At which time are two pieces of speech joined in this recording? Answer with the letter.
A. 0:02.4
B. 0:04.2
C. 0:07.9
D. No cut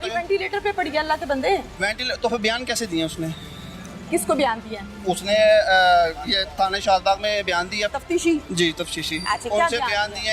C